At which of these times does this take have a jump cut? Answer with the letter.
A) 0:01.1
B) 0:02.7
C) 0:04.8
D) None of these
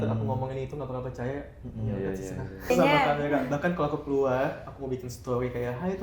B